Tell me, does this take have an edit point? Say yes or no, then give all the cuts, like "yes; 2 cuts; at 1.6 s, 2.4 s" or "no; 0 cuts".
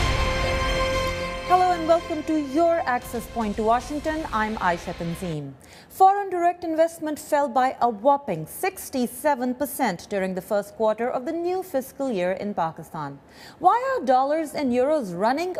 no; 0 cuts